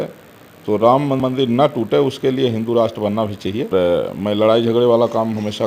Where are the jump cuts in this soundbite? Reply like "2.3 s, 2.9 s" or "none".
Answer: 1.2 s, 3.7 s